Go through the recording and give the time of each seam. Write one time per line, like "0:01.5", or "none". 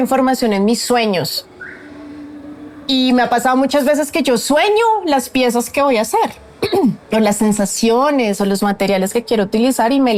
none